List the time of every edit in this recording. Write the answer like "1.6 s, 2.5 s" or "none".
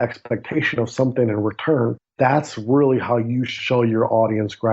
2.0 s, 3.5 s

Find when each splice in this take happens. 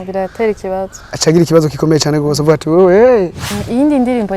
3.4 s

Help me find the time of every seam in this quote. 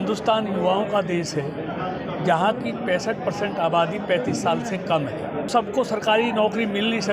5.5 s

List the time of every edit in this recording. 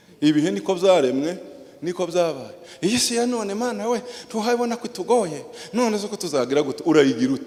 none

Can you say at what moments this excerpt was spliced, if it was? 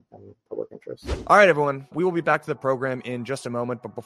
1.2 s

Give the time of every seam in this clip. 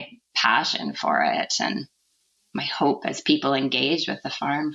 none

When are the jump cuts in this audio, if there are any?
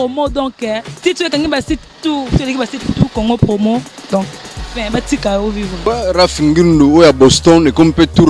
none

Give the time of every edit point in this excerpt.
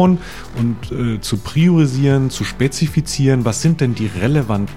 none

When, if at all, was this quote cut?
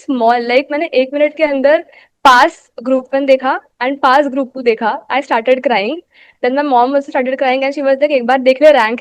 none

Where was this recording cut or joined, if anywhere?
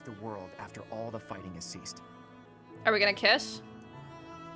2.5 s

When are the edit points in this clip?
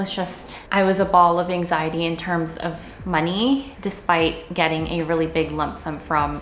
none

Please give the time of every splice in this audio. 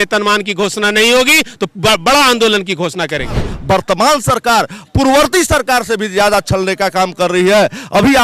3.5 s

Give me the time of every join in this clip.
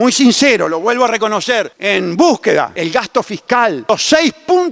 1.8 s, 2.7 s, 3.9 s

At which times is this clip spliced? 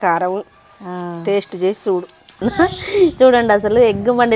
2.4 s

